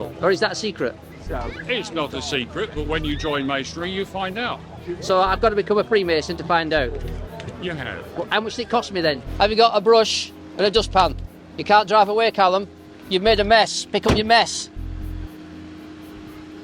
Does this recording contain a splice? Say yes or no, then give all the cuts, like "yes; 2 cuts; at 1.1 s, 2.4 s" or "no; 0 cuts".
yes; 1 cut; at 9.3 s